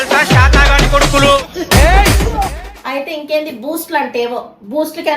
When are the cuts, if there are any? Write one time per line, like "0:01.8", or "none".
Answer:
0:02.6